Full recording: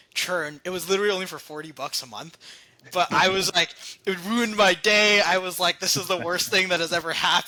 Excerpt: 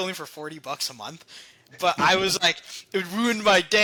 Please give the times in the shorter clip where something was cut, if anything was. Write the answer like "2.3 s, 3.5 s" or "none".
none

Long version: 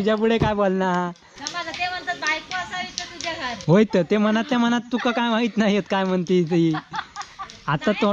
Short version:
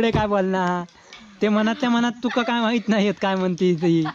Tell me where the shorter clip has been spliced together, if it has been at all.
1.4 s

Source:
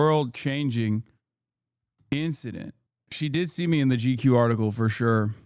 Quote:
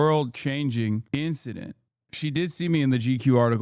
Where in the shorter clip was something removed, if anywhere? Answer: 1.0 s

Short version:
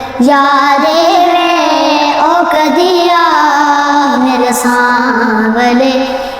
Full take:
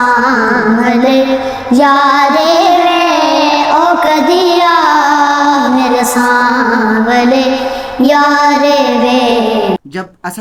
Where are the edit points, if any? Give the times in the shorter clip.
none

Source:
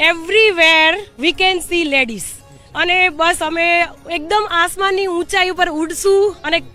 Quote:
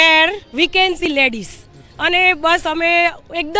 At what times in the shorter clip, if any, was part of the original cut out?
1.1 s

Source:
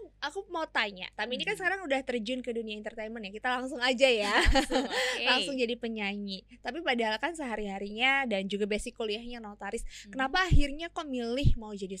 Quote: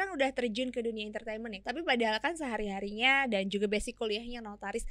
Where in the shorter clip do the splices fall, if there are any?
1.5 s

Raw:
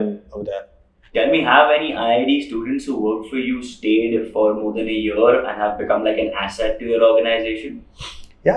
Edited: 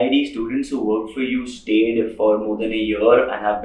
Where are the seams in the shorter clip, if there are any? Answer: none

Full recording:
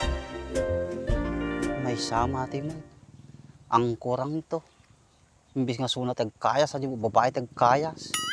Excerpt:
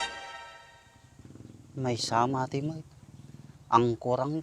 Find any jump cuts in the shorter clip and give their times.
none

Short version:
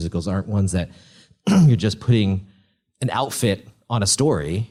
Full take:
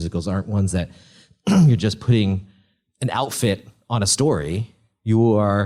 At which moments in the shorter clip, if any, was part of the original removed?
none

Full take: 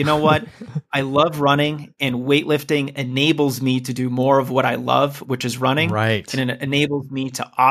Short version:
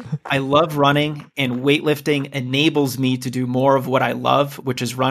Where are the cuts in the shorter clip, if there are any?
none

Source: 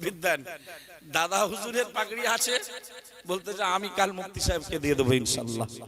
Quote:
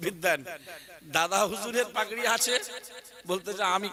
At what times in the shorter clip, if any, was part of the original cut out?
none

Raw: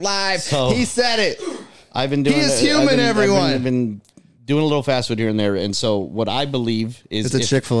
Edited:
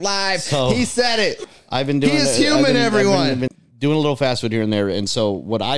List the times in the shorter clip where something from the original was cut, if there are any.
1.5 s, 3.5 s

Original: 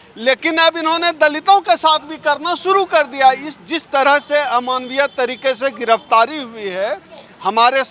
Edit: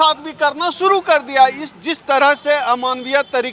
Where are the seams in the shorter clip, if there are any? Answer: none

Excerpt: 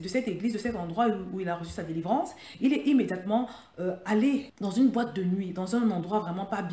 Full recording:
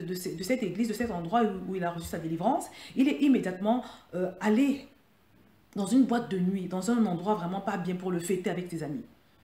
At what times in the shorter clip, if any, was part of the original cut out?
4.6 s

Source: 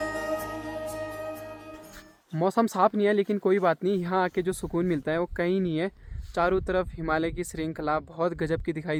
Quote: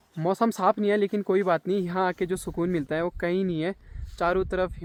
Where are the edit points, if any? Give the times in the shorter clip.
none

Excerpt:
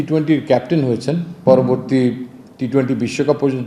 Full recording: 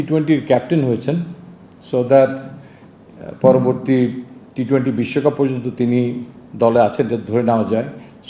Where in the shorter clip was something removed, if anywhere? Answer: 1.3 s

